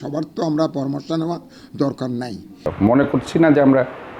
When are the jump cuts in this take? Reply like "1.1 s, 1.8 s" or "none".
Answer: 2.7 s